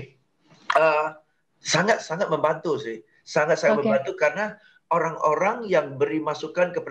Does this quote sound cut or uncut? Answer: uncut